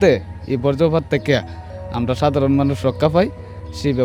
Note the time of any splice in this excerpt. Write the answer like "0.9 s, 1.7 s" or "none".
none